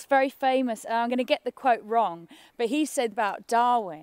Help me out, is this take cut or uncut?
cut